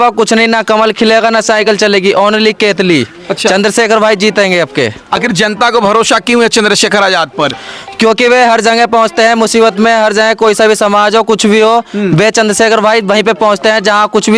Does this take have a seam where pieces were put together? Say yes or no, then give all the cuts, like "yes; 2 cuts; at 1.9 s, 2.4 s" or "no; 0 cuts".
no; 0 cuts